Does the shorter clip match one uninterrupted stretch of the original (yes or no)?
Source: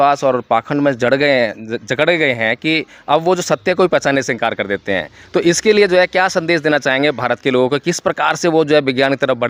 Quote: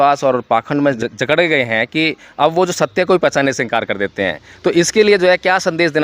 no